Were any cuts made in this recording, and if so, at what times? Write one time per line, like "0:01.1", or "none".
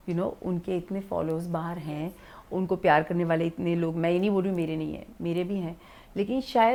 none